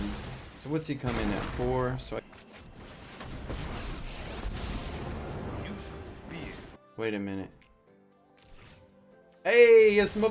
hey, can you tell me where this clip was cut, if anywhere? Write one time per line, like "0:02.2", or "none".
0:02.2
0:06.8